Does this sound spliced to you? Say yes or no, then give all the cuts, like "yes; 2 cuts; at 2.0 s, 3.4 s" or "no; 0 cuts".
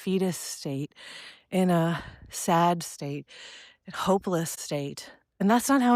yes; 1 cut; at 4.6 s